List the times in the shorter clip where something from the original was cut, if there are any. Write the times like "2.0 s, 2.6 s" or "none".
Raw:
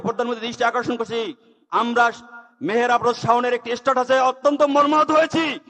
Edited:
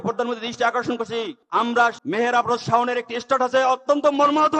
1.6 s